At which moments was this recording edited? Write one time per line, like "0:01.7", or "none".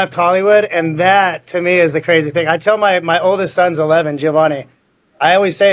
none

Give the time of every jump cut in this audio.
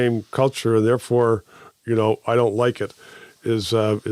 none

